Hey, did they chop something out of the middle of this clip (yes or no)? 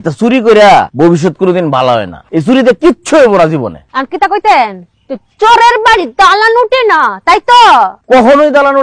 yes